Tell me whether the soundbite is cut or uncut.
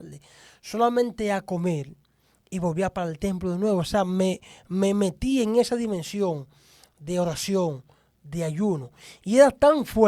uncut